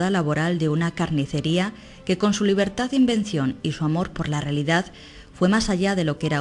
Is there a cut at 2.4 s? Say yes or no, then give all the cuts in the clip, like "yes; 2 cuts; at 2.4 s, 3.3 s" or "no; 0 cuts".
yes; 1 cut; at 2.4 s